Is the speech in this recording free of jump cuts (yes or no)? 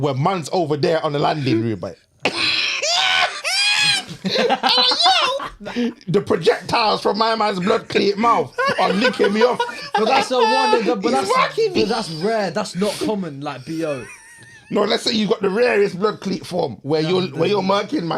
yes